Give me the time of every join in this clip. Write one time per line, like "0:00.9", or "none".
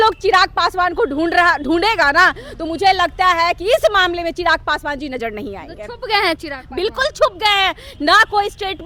none